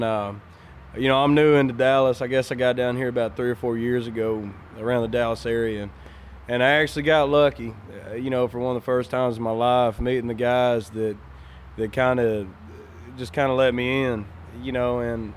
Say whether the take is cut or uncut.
uncut